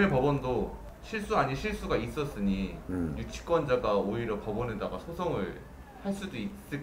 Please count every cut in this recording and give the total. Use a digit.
0